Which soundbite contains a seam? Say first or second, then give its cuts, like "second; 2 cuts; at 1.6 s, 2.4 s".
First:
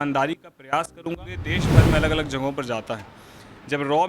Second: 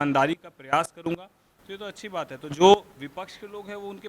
first; 1 cut; at 1.6 s